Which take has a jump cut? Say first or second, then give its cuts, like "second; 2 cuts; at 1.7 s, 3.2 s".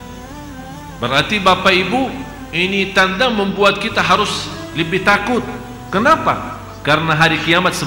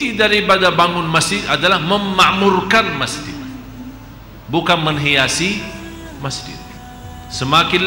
second; 1 cut; at 6.8 s